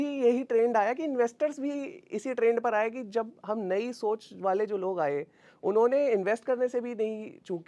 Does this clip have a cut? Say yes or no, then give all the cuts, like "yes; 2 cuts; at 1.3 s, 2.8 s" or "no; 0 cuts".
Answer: no; 0 cuts